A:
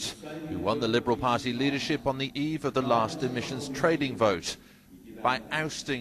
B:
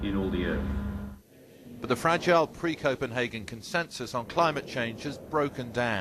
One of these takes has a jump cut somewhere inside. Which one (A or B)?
A